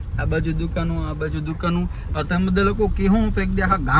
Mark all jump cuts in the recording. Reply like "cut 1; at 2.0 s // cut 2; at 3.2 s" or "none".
none